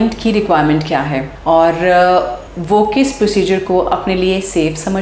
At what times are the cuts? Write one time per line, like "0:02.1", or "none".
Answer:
none